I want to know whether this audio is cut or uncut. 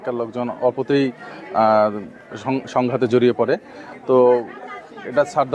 uncut